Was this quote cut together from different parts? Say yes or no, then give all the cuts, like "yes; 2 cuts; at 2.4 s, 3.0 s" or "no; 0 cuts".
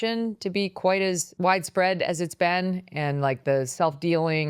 yes; 1 cut; at 1.3 s